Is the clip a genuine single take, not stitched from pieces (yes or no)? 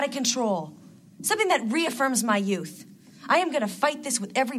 yes